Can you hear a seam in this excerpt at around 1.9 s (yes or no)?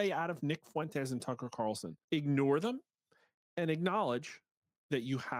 yes